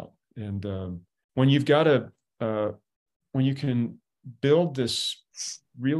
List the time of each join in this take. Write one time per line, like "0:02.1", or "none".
0:01.2